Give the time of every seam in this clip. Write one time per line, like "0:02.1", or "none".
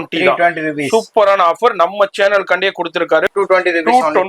0:03.3